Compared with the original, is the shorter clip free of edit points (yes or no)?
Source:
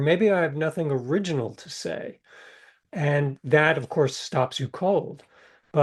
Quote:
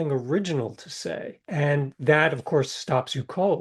no